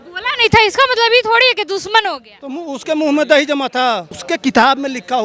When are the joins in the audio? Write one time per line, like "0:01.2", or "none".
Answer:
0:04.1